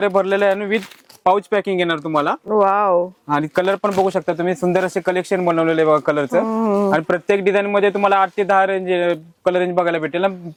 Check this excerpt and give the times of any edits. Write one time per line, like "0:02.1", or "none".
none